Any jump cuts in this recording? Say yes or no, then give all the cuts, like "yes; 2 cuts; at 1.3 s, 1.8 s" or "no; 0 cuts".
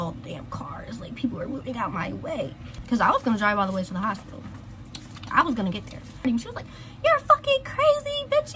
yes; 2 cuts; at 2.8 s, 6.2 s